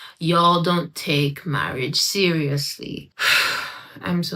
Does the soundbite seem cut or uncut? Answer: cut